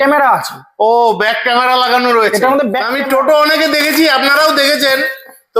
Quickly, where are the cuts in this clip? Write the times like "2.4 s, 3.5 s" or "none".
2.9 s

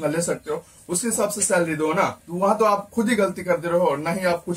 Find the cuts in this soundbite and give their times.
2.2 s

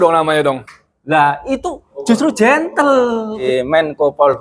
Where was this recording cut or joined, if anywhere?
3.4 s

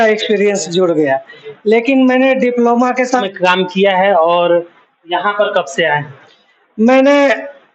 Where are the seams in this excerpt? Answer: 3.3 s

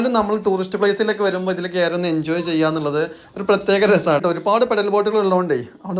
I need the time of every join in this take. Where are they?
4.2 s

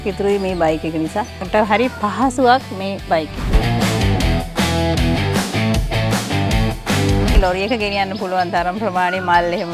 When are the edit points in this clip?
1.5 s, 3.5 s, 7.3 s

